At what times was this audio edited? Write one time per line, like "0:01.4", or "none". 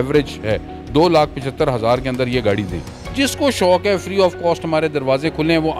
0:03.0